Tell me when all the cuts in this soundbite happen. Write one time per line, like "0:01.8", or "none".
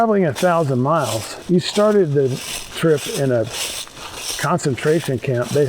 0:01.3